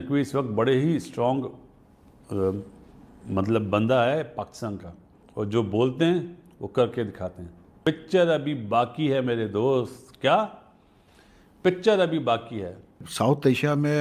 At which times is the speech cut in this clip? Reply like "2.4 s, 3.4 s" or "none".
5.2 s, 7.7 s